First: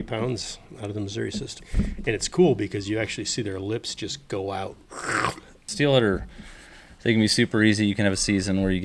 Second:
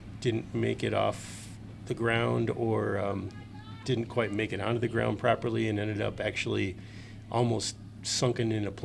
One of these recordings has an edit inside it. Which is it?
first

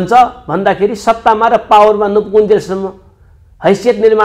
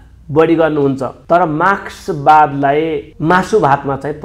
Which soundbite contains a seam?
second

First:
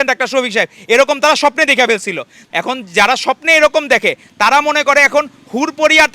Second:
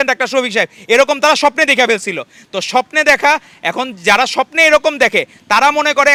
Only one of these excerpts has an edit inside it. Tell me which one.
first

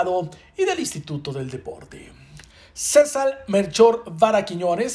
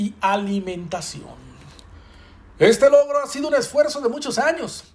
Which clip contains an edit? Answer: second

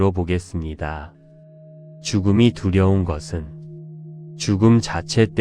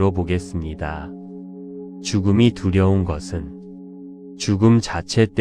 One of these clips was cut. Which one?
first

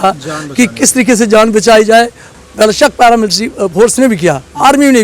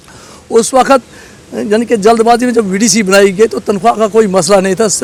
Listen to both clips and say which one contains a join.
first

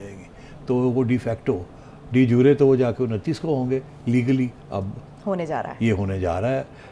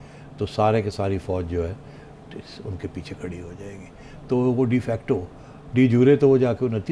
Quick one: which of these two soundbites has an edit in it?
first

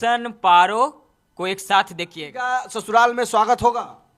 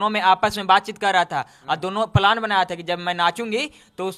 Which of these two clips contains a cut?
first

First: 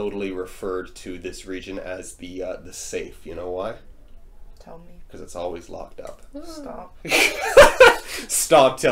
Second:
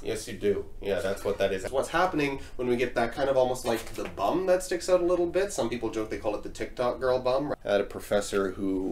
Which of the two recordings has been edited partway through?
second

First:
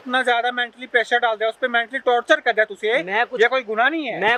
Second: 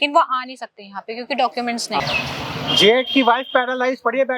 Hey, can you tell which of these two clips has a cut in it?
second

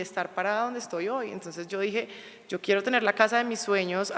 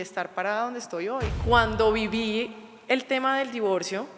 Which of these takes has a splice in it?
second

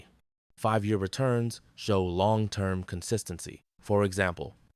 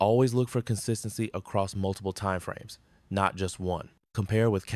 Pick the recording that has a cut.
first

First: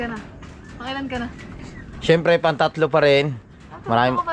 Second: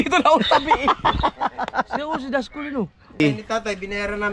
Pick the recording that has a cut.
second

